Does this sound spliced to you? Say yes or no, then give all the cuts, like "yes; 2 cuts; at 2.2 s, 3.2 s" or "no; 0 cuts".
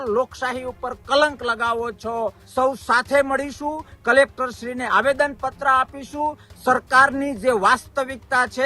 yes; 1 cut; at 2.4 s